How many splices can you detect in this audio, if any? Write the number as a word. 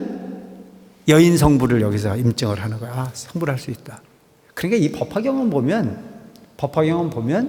zero